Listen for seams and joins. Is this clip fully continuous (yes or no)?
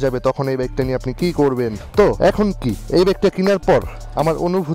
no